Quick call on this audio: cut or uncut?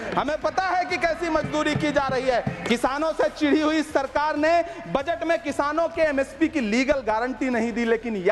cut